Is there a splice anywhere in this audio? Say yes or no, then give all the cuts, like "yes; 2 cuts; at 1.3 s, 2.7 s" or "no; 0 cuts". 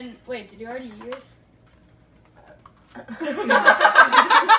no; 0 cuts